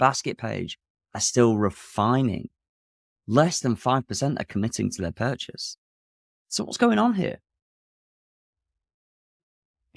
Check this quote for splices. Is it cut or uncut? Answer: uncut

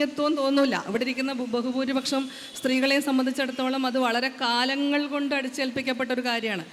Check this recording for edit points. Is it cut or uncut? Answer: uncut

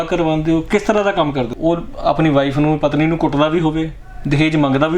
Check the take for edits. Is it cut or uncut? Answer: cut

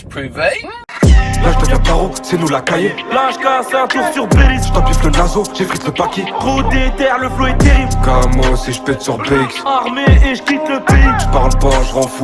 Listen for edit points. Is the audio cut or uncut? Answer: cut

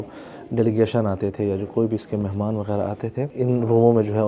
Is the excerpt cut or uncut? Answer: cut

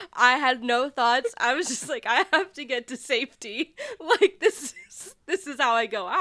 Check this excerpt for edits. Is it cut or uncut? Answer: uncut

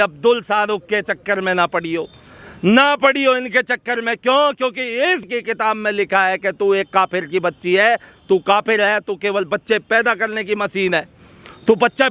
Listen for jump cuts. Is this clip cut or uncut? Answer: uncut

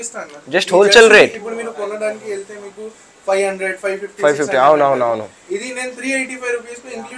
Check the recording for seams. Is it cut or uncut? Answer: uncut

